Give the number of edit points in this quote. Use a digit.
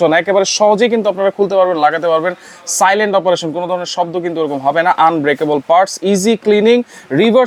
0